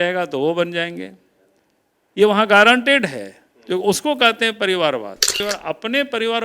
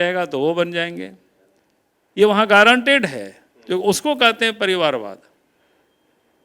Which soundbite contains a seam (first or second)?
first